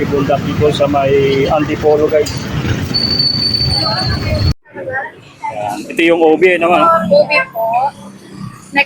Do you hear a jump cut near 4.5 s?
yes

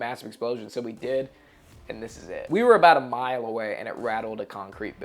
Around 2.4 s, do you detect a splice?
yes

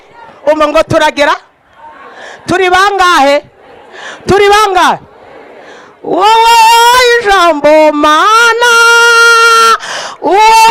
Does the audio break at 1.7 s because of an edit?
no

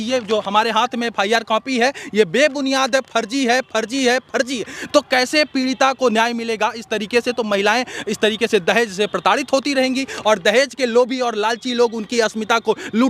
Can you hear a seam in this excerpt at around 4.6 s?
no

